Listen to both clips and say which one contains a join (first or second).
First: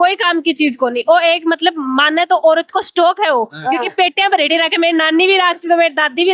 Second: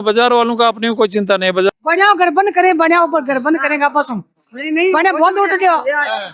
second